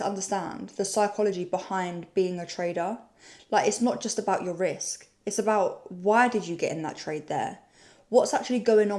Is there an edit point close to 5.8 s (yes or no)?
no